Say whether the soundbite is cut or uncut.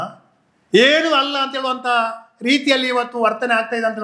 uncut